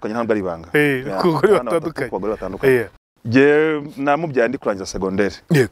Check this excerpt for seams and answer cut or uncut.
cut